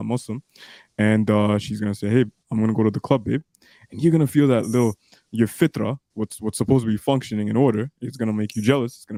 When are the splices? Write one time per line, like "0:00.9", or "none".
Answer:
none